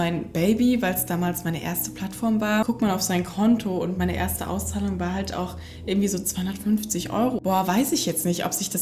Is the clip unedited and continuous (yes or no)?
no